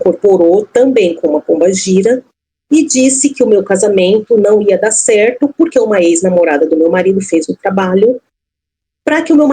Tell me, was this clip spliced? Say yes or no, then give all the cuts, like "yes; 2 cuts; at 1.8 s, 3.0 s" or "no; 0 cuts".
no; 0 cuts